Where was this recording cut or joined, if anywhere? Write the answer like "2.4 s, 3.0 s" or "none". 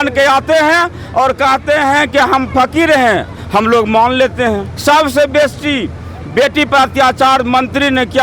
4.7 s